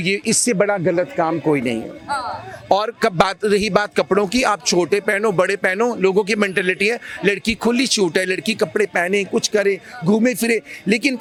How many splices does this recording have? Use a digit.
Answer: 0